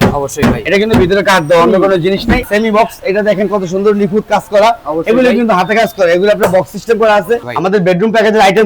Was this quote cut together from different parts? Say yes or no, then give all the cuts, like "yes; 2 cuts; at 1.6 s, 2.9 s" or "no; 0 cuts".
yes; 2 cuts; at 2.4 s, 7.4 s